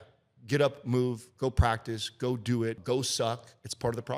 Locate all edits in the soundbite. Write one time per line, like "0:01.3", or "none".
0:02.8